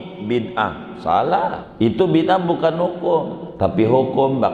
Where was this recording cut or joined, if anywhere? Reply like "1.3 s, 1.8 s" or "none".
1.7 s, 3.4 s